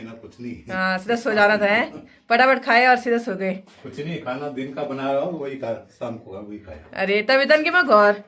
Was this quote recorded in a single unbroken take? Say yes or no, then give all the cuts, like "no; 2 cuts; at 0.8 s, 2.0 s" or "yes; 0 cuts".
yes; 0 cuts